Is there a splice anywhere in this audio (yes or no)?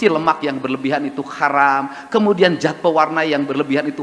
no